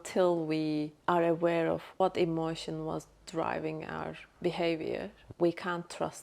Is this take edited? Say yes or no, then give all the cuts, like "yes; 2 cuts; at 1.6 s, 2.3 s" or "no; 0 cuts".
yes; 3 cuts; at 0.9 s, 4.2 s, 5.2 s